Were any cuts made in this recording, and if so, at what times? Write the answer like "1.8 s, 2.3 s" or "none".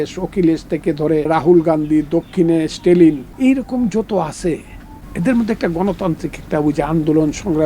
1.3 s, 3.3 s